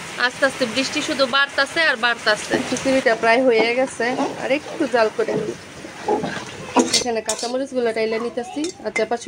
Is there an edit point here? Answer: yes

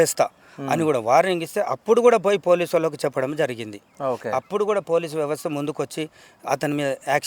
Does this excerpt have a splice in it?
no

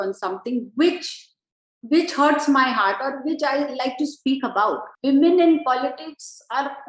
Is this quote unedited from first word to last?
no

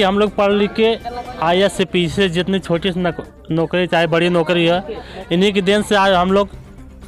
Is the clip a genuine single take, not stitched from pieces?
yes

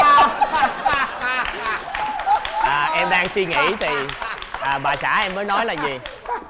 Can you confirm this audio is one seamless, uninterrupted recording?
yes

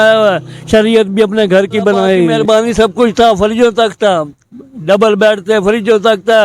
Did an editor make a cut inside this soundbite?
yes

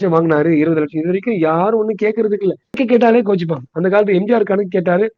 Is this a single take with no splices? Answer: no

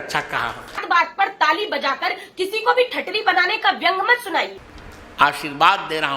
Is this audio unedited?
no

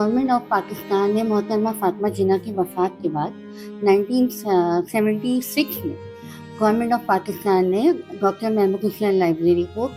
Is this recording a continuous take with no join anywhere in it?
yes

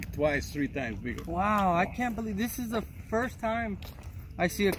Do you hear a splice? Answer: yes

